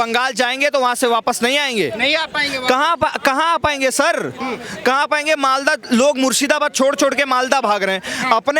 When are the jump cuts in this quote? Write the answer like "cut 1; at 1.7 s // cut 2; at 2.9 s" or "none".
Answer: none